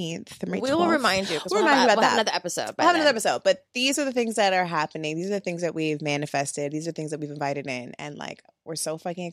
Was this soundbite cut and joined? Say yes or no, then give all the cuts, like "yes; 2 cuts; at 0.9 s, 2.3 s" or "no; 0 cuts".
no; 0 cuts